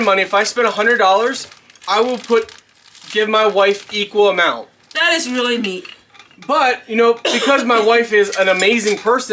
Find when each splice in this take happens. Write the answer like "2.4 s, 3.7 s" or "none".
none